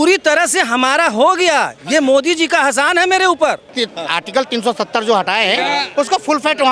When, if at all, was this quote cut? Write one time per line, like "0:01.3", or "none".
0:03.7